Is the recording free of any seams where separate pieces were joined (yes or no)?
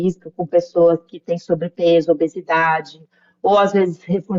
yes